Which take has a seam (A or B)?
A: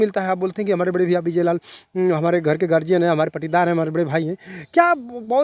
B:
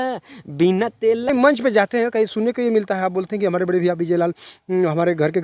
B